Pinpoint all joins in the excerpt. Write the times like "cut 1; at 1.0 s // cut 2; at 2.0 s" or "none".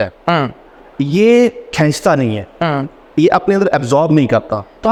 none

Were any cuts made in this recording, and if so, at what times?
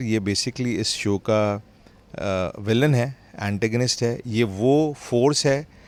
none

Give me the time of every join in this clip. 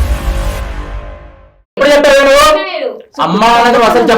cut 1; at 1.8 s

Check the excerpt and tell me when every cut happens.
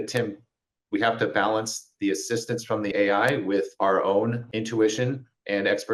cut 1; at 2.9 s // cut 2; at 3.7 s // cut 3; at 4.5 s

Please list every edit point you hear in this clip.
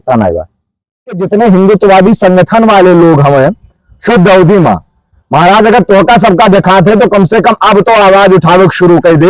cut 1; at 1.2 s

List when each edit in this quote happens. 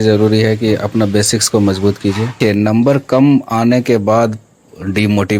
cut 1; at 2.4 s

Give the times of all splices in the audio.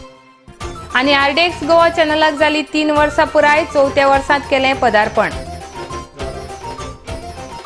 none

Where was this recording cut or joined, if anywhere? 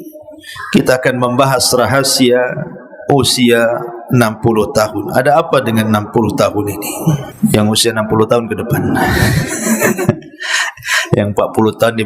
cut 1; at 7.3 s

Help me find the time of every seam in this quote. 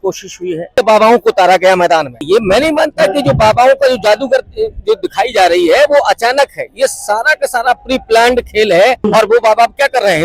cut 1; at 0.8 s // cut 2; at 2.2 s // cut 3; at 9.1 s

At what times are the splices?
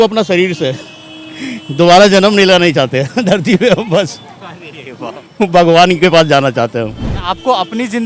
cut 1; at 7.0 s

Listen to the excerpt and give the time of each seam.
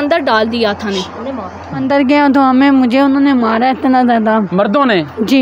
cut 1; at 1.8 s

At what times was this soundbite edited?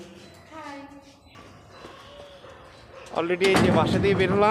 cut 1; at 1.3 s

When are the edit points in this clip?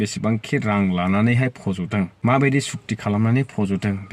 cut 1; at 2.1 s

